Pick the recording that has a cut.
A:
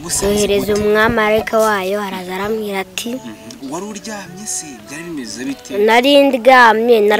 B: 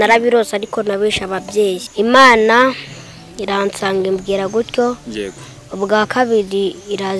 B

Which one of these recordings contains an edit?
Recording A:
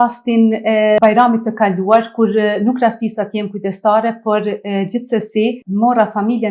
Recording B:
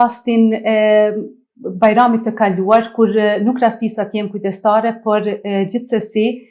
A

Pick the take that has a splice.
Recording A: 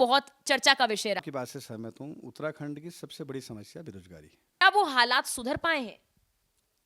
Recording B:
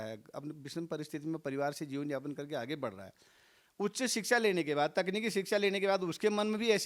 A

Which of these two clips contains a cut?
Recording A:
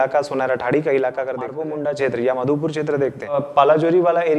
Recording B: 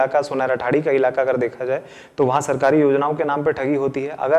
A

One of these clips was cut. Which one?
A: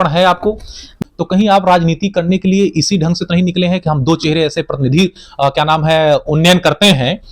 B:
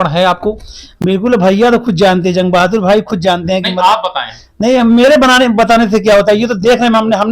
A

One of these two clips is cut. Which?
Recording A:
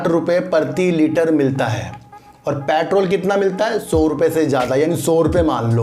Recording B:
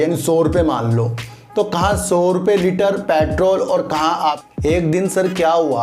B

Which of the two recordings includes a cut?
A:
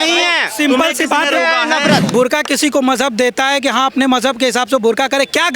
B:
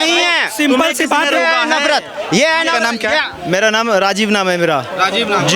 A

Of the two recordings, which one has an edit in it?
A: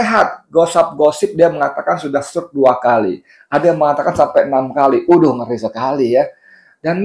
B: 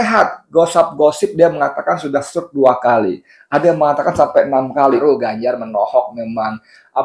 B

